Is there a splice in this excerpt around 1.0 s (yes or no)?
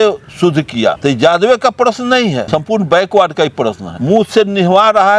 yes